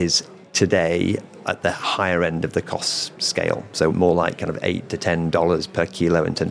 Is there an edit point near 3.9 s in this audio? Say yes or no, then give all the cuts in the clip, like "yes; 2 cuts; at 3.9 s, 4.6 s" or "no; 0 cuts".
yes; 1 cut; at 3.9 s